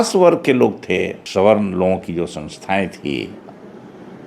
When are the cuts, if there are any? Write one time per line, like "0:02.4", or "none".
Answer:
0:01.2